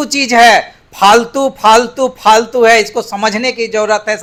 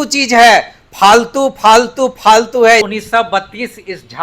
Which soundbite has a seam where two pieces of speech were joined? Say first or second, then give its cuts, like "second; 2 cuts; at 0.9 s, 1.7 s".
second; 1 cut; at 2.9 s